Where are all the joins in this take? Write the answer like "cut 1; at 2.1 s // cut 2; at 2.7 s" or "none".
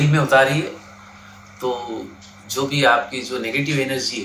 none